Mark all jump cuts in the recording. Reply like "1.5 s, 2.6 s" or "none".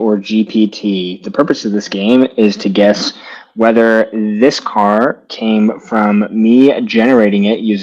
none